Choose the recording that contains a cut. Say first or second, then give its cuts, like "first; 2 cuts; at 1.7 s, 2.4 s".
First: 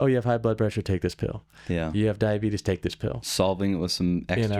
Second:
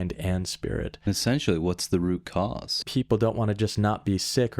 second; 2 cuts; at 1.0 s, 2.8 s